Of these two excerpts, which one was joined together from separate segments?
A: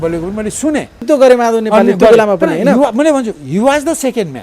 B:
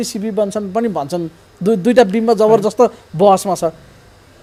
A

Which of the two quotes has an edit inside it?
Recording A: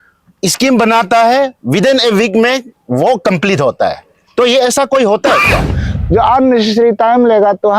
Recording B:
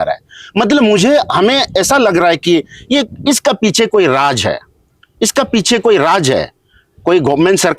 A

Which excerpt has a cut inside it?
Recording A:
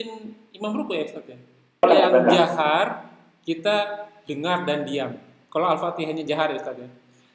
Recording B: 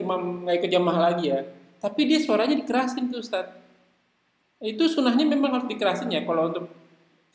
A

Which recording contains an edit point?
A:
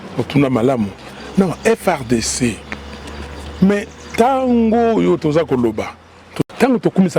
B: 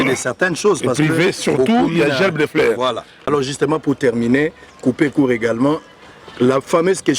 B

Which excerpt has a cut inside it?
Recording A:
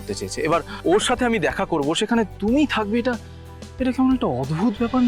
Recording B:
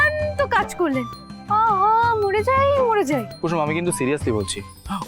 B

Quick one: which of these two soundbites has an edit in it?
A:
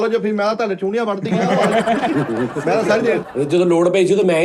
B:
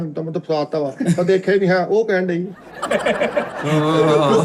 A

